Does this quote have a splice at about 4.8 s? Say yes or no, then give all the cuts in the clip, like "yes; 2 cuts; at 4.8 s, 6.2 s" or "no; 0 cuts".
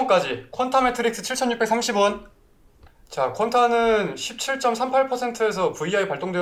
no; 0 cuts